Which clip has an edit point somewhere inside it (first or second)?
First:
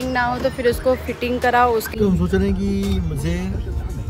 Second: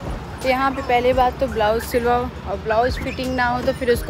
first